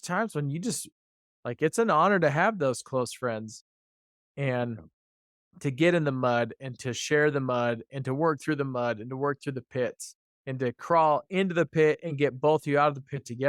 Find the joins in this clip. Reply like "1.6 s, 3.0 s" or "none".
none